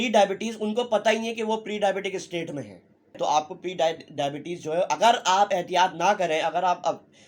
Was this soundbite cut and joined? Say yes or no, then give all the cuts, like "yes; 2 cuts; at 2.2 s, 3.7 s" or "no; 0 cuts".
yes; 1 cut; at 3.2 s